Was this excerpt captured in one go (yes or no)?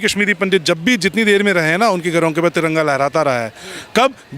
yes